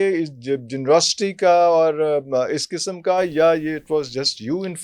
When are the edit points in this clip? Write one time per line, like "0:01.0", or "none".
none